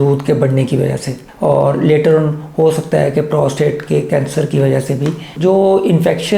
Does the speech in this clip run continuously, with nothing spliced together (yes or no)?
no